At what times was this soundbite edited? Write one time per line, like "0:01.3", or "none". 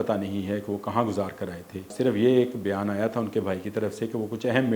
0:01.9